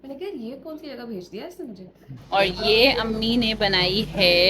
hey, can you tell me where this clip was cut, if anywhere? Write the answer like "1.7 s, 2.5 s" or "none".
2.1 s